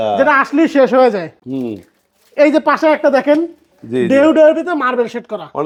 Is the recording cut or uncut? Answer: uncut